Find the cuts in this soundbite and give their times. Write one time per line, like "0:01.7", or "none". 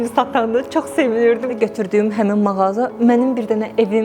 0:01.5

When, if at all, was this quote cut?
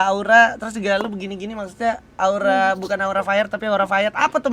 none

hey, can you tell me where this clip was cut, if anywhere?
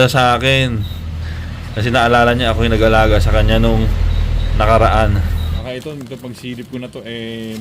0:05.6

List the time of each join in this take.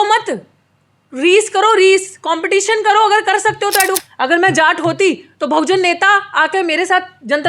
0:04.0

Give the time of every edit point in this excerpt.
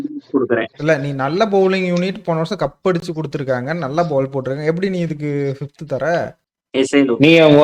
none

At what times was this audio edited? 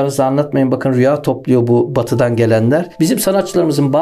0:02.9

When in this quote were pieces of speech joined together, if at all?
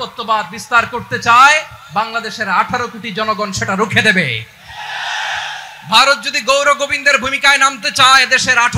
none

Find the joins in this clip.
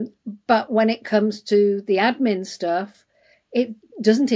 none

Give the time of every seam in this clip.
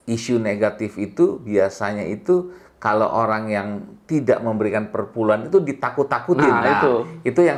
none

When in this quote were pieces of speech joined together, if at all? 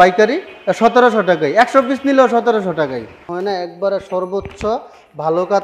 0:03.3

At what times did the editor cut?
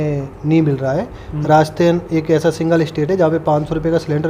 none

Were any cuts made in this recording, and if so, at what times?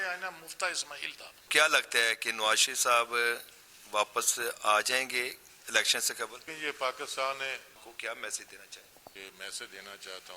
0:01.5
0:06.5
0:07.8
0:09.1

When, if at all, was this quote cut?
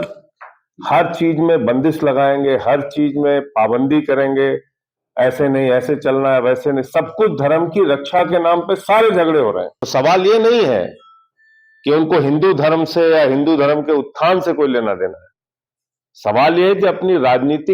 0:09.8

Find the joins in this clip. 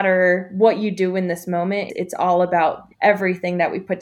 0:01.9
0:02.9

